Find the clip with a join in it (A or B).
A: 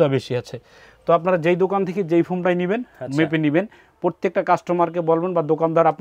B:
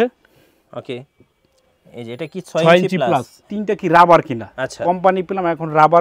B